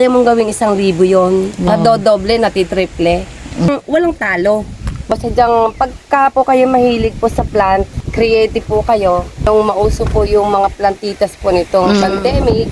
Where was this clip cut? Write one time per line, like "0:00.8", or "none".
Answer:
0:01.6
0:03.7
0:05.1
0:08.0
0:09.4